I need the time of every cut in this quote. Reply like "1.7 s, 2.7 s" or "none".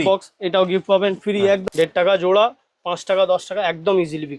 1.6 s